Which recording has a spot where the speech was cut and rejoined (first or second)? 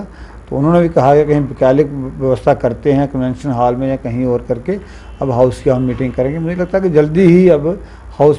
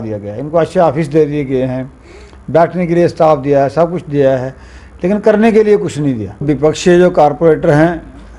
second